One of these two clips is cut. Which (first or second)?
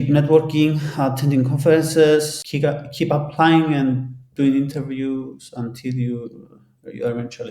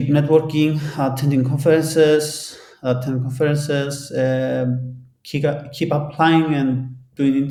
first